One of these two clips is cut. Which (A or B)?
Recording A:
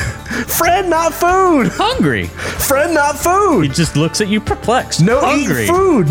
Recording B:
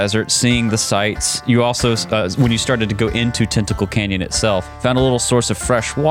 B